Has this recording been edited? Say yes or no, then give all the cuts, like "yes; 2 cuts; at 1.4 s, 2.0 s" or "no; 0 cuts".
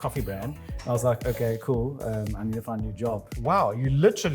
yes; 1 cut; at 3.3 s